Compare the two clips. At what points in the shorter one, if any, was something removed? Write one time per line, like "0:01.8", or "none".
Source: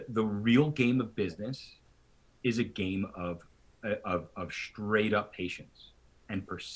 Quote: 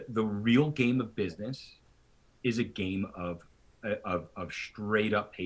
none